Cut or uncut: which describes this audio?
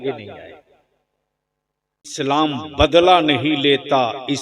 cut